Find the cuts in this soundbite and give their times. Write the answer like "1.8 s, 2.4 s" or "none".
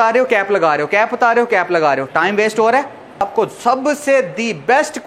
3.2 s